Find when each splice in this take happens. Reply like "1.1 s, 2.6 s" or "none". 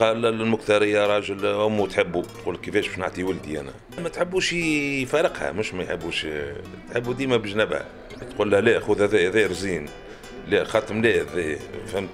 4.0 s, 8.2 s